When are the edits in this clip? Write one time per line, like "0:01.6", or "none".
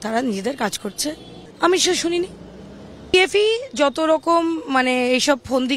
0:00.9